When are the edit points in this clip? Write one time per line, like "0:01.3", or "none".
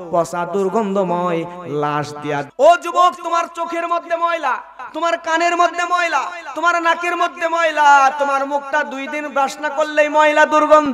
0:02.5